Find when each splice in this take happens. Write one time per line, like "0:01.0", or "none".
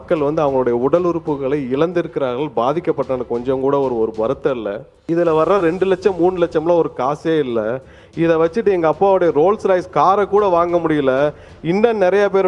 0:04.9